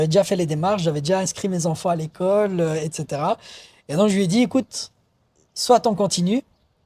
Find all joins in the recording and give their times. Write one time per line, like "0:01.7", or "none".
none